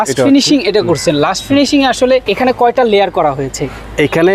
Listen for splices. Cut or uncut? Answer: cut